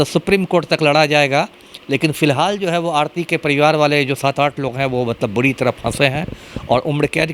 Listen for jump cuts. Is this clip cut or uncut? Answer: uncut